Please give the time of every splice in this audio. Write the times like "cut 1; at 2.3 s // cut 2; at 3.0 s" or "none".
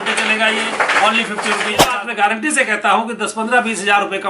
cut 1; at 1.9 s

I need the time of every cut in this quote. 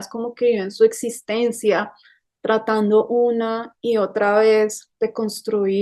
none

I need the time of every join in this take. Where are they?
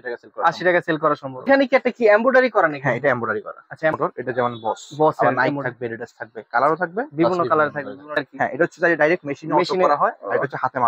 cut 1; at 1.5 s // cut 2; at 3.9 s // cut 3; at 8.2 s

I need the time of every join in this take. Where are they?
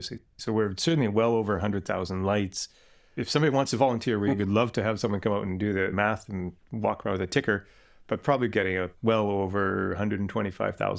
none

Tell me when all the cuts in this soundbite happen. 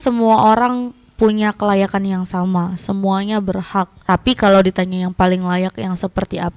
cut 1; at 4.0 s

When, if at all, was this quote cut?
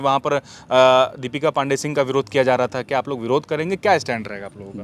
none

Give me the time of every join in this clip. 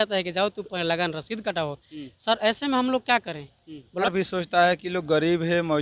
cut 1; at 4.1 s

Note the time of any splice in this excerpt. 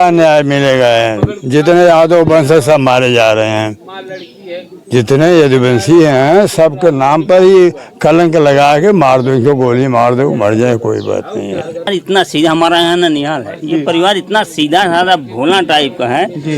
cut 1; at 11.9 s

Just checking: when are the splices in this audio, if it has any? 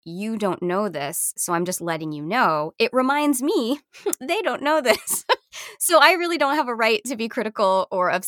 none

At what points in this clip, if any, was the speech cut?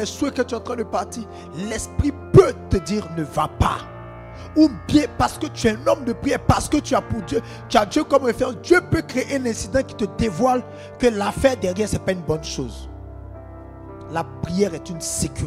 none

